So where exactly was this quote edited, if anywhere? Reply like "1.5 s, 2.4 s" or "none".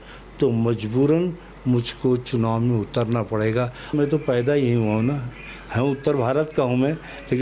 3.9 s